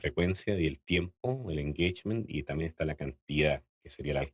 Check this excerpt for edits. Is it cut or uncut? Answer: uncut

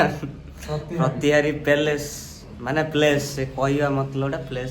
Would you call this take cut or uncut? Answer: cut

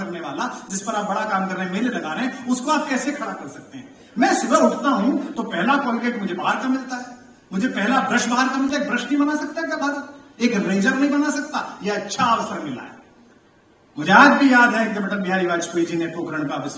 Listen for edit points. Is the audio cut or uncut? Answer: uncut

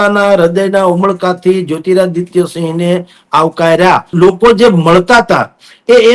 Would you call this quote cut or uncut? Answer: cut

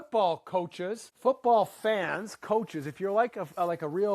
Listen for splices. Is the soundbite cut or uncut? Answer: cut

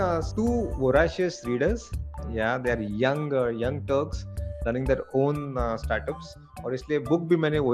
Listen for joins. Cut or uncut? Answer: uncut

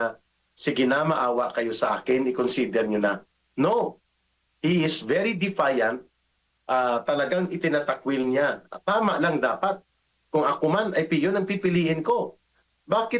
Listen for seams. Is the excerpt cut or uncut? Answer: uncut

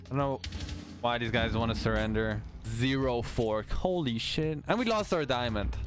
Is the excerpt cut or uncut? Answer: cut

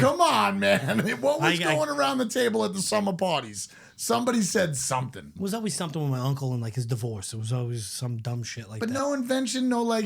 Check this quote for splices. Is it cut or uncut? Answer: cut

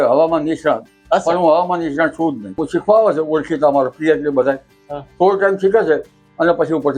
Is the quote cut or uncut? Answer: cut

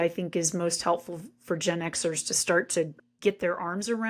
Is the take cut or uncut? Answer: cut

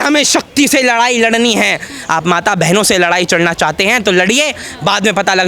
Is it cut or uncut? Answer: uncut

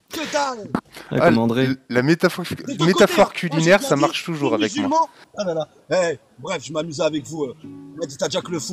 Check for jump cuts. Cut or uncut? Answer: cut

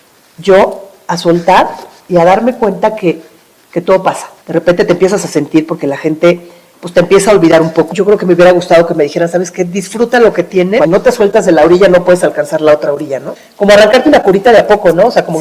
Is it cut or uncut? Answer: cut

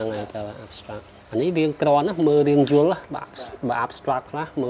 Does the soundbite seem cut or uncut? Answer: cut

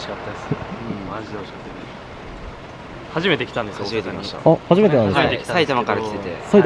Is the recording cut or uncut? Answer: uncut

